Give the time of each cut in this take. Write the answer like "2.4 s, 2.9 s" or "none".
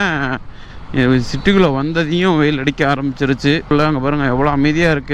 3.7 s